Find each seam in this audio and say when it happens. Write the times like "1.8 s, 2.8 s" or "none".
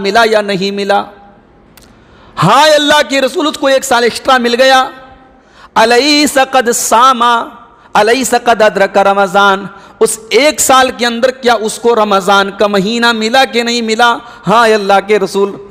none